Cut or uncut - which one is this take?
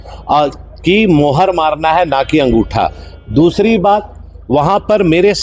uncut